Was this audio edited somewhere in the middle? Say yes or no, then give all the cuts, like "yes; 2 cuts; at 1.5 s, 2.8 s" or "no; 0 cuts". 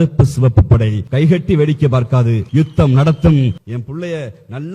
yes; 3 cuts; at 1.0 s, 2.4 s, 3.6 s